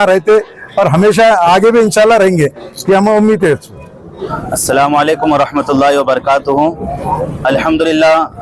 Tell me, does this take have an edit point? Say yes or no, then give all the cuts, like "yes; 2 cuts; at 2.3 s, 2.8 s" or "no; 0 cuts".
no; 0 cuts